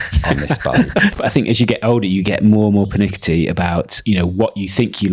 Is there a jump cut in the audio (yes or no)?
yes